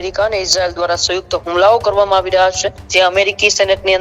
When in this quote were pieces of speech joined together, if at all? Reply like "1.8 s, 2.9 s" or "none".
2.7 s